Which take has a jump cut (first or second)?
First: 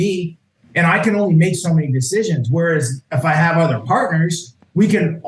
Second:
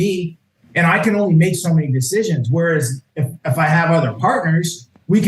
first